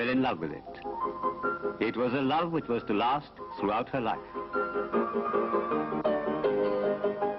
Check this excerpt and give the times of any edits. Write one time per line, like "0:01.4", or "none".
0:02.6